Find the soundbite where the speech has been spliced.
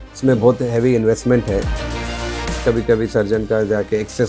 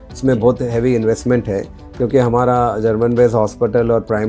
first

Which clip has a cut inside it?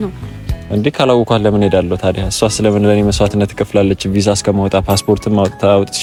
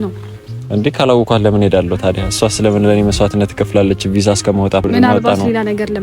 second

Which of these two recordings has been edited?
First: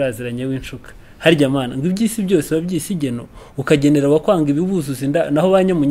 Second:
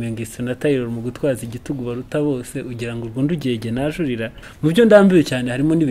second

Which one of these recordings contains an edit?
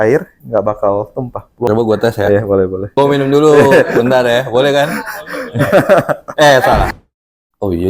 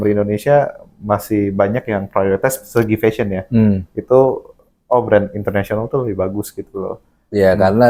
first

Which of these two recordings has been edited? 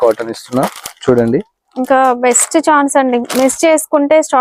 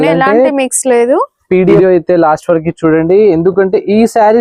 second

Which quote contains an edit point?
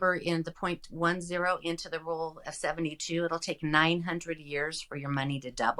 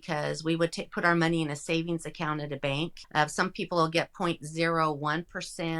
second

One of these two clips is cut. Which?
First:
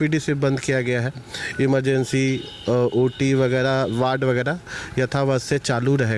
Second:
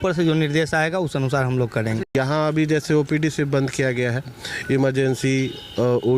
second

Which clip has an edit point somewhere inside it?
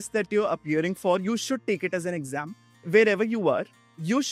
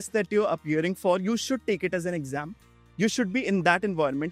first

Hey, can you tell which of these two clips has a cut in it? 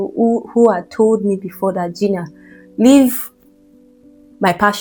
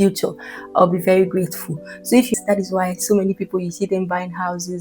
second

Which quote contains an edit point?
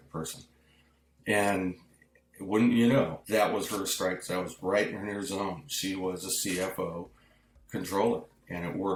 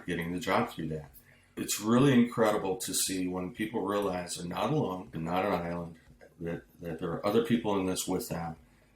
second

